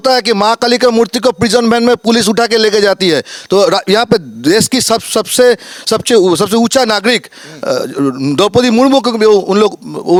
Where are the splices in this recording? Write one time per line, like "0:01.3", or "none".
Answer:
none